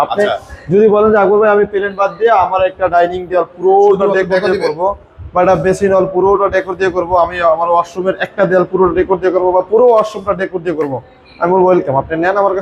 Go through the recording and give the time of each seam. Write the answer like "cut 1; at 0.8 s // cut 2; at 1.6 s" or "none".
none